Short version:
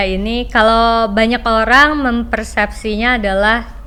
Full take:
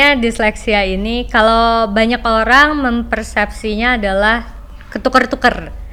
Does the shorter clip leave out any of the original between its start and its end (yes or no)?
no